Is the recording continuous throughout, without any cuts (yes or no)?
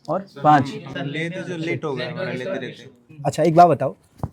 yes